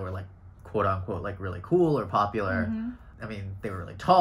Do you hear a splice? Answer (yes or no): yes